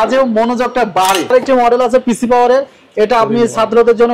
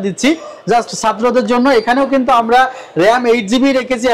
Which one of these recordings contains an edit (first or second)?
first